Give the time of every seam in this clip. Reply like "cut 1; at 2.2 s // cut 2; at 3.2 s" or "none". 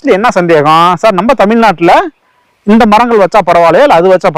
none